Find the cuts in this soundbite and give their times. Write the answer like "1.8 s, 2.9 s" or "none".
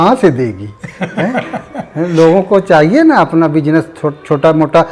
none